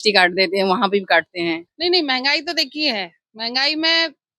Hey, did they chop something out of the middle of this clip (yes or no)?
yes